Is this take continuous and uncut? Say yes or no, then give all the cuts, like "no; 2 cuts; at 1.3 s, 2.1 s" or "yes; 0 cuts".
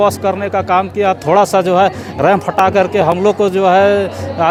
yes; 0 cuts